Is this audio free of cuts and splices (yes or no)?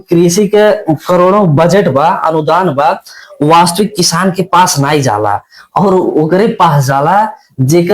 yes